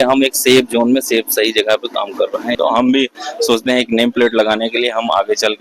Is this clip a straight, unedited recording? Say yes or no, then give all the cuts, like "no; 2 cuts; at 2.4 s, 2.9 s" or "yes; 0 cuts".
no; 1 cut; at 2.6 s